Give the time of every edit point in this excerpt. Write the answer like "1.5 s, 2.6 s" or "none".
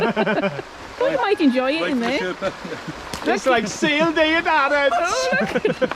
none